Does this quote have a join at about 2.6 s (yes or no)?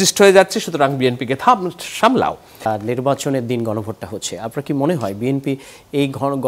yes